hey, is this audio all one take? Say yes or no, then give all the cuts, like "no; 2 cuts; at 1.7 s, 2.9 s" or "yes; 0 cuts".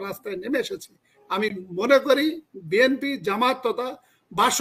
yes; 0 cuts